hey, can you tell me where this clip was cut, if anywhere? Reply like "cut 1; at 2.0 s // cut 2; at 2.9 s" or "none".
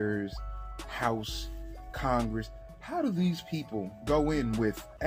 none